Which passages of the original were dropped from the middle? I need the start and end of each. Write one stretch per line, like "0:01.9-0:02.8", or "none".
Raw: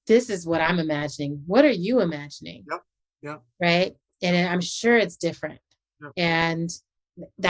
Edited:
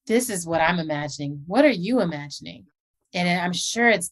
0:03.0-0:04.1